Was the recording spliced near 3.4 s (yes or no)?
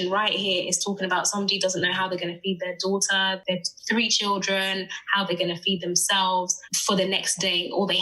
yes